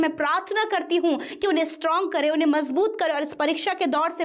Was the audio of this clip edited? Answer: no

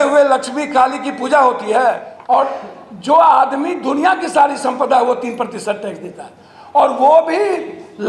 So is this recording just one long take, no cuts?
no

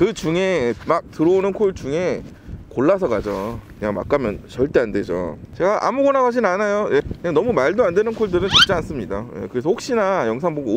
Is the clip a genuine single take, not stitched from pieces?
no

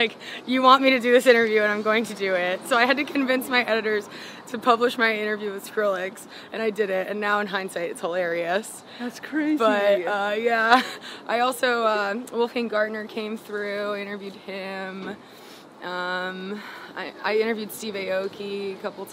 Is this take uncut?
yes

